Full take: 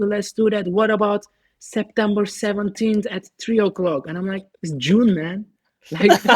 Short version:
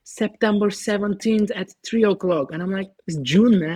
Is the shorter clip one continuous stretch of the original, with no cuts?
yes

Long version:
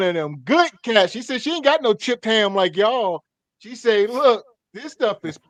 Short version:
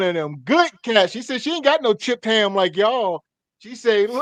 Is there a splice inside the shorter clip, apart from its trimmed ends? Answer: no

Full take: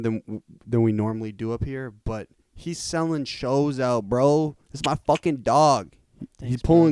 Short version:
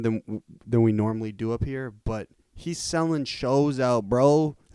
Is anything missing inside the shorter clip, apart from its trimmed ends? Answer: no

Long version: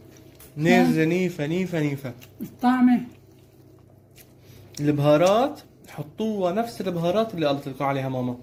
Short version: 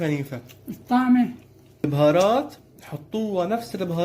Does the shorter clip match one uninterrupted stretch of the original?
no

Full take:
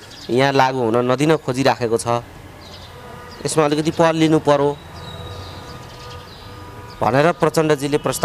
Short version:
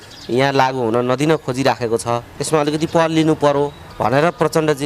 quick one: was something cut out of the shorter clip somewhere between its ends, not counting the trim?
yes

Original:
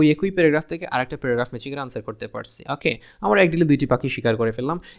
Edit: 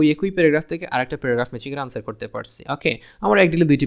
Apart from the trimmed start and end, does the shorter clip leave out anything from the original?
no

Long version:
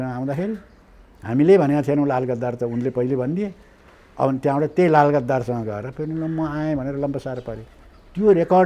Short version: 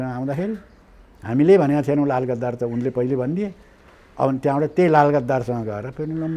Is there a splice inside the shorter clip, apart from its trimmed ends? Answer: no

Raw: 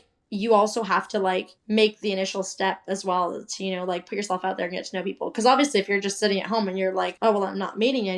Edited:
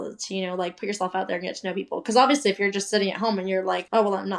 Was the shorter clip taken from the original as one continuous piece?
yes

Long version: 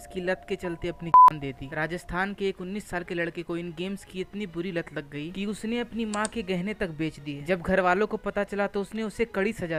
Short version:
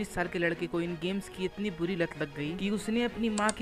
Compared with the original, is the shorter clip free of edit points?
yes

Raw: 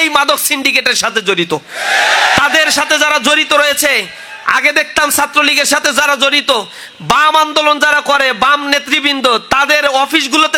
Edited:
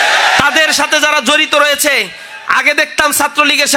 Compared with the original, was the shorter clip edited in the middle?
no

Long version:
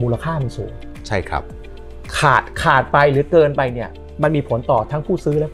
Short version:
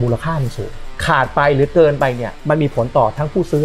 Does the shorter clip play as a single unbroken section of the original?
no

